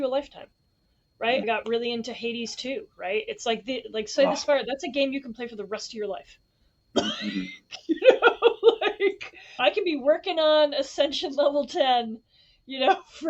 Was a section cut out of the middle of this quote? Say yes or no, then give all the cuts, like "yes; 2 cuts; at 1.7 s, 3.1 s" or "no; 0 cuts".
yes; 1 cut; at 1.4 s